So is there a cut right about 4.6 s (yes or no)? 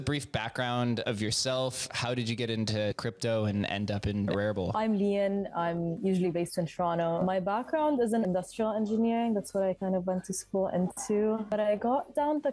yes